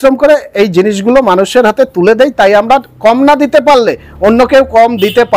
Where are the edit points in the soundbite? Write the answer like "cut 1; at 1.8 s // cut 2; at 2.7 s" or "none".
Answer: none